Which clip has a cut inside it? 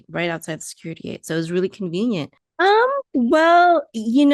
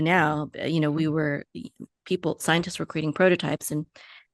first; 1 cut; at 2.4 s

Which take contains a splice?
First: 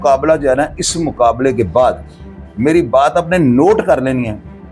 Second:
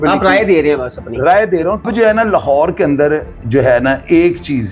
second; 1 cut; at 1.8 s

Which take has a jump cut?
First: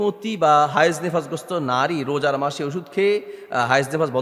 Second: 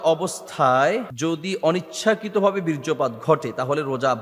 second; 1 cut; at 1.1 s

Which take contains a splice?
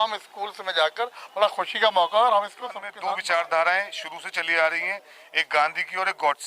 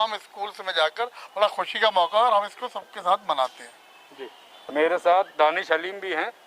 first; 1 cut; at 2.9 s

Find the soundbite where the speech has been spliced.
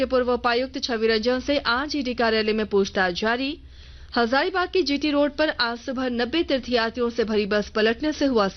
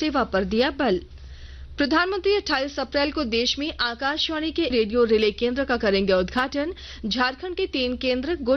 second; 1 cut; at 4.7 s

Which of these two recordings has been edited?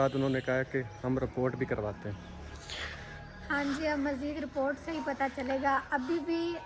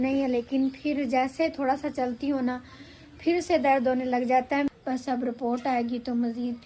second; 1 cut; at 4.7 s

